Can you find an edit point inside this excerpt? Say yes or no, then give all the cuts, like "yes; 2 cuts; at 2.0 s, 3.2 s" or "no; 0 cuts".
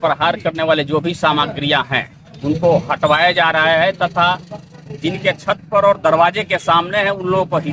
no; 0 cuts